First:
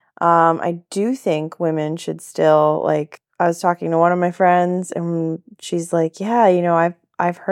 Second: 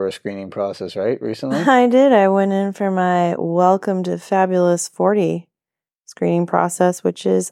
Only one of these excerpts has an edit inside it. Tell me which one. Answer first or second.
first